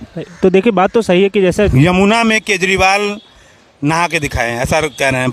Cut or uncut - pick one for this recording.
cut